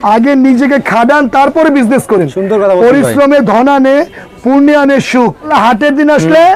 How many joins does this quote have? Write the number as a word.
one